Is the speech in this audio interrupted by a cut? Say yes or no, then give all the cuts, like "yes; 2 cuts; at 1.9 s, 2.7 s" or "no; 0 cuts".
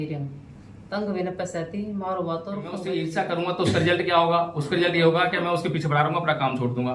yes; 1 cut; at 2.8 s